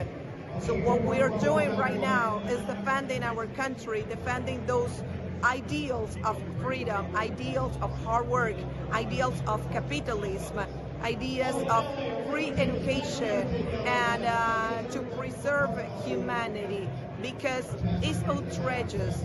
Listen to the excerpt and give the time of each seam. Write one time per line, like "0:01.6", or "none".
none